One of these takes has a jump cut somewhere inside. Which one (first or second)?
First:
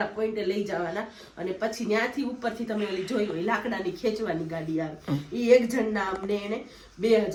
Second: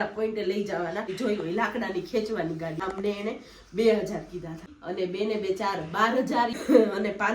second